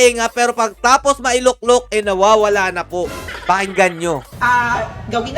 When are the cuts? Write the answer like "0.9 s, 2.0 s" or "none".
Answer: none